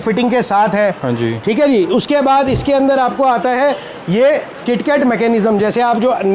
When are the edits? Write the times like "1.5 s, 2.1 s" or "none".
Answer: none